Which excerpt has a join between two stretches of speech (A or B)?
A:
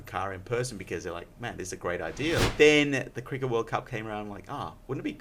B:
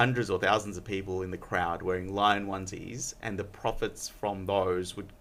A